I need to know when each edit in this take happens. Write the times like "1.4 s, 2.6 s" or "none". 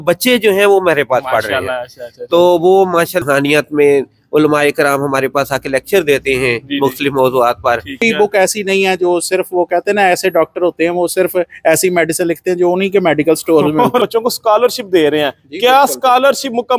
3.2 s, 8.0 s, 14.1 s